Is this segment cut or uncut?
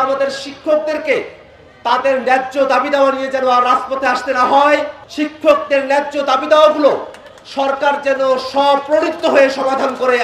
cut